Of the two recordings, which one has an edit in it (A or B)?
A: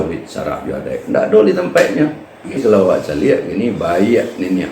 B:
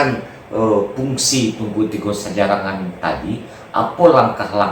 A